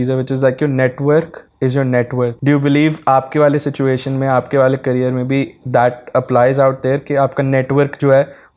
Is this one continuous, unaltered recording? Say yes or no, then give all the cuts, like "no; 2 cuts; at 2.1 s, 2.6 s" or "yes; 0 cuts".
no; 1 cut; at 2.4 s